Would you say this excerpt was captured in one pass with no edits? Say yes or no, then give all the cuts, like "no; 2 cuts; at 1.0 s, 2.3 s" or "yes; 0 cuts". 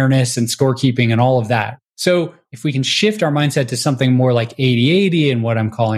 no; 2 cuts; at 1.7 s, 2.4 s